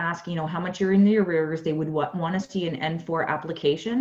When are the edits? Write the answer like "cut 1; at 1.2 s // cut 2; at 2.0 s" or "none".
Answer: none

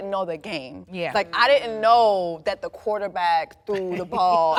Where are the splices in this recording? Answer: none

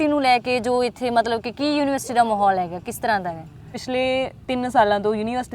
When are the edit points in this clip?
cut 1; at 3.8 s

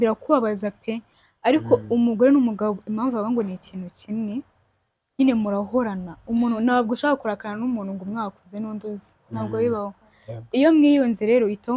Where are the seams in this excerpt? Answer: none

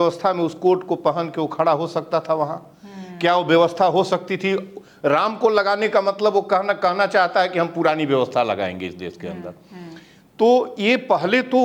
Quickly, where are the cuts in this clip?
none

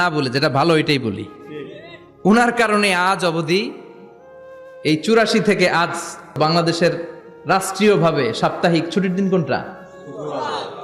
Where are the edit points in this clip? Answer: cut 1; at 6.4 s

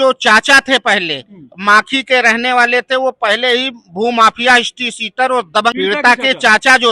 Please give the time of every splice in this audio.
cut 1; at 5.8 s

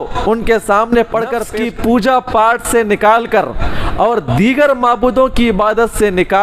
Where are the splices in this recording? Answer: cut 1; at 1.4 s

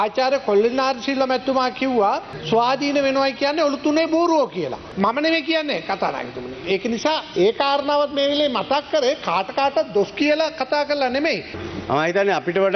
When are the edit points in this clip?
none

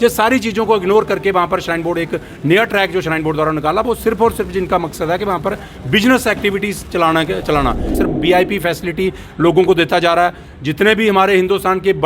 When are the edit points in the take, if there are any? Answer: cut 1; at 8.0 s

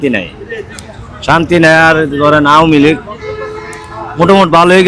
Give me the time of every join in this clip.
none

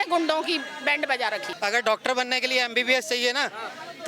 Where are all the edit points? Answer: cut 1; at 1.5 s

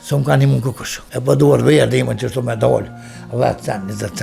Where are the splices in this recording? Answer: cut 1; at 0.9 s

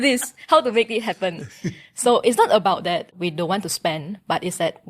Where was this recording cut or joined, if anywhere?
cut 1; at 3.1 s

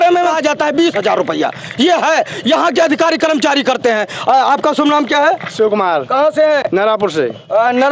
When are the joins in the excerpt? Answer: none

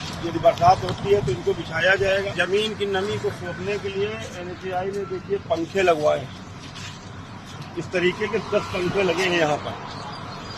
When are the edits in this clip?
cut 1; at 2.3 s

